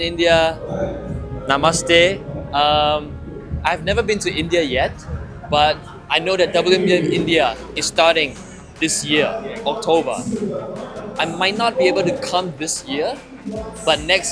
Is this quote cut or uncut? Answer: uncut